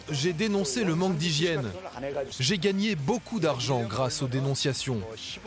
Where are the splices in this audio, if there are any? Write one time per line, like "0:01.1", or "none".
0:02.3